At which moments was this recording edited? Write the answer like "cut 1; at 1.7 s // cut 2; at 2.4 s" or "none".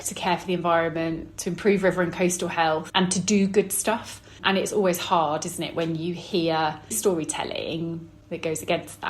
cut 1; at 2.9 s // cut 2; at 7.0 s